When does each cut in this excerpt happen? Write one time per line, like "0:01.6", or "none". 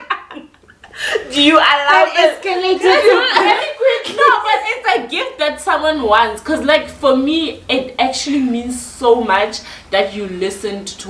none